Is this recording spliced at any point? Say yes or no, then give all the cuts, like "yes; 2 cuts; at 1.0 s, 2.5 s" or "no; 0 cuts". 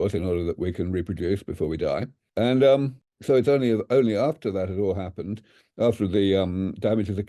no; 0 cuts